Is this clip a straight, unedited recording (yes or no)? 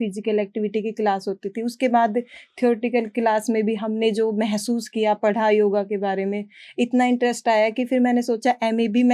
yes